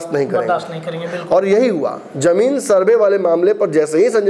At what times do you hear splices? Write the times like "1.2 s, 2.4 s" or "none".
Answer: none